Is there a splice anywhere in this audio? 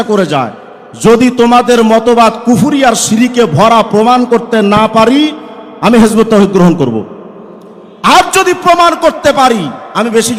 no; 0 cuts

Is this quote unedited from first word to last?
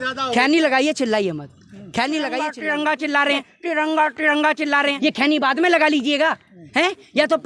no; 2 cuts; at 2.6 s, 4.9 s

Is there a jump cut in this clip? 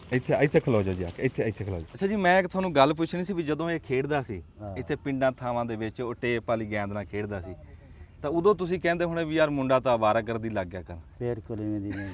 yes; 1 cut; at 1.9 s

